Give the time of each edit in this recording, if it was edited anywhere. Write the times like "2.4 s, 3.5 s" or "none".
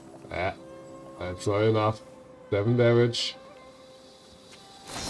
4.0 s